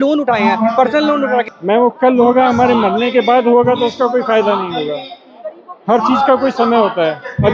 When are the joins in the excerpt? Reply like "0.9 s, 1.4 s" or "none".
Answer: 1.5 s